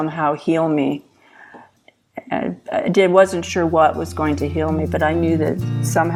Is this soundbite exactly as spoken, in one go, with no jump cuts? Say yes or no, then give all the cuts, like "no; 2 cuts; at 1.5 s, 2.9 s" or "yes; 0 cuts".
no; 1 cut; at 1.7 s